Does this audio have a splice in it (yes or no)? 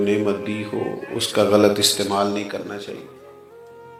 no